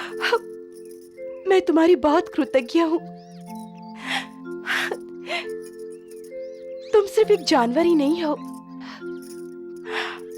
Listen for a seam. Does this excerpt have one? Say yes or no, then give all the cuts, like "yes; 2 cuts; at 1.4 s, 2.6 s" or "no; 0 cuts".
no; 0 cuts